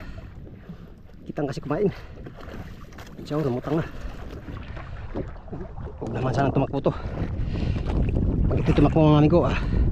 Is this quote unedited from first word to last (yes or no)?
no